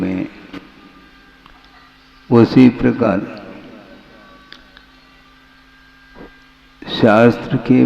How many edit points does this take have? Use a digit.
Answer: 1